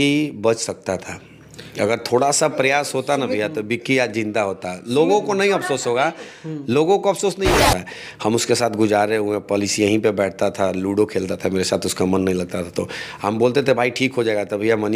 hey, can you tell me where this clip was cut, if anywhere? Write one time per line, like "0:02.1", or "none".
0:07.6